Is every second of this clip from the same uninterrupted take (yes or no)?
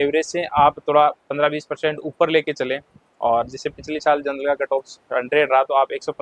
yes